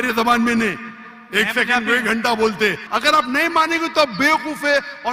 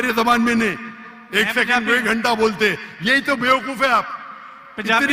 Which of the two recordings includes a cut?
first; 1 cut; at 2.8 s

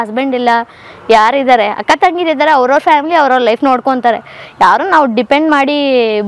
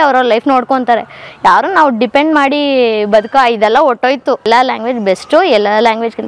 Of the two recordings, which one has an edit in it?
second; 1 cut; at 4.5 s

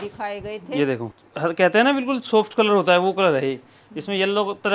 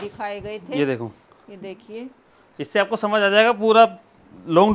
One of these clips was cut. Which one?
first; 1 cut; at 1.2 s

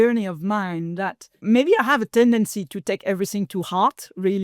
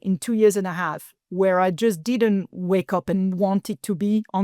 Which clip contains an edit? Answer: first; 1 cut; at 1.4 s

